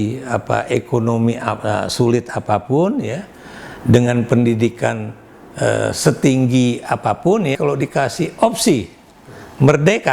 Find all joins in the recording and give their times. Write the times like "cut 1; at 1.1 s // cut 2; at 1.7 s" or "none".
cut 1; at 7.6 s